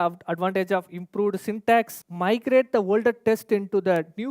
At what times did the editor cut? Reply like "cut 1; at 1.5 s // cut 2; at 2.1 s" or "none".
cut 1; at 2.0 s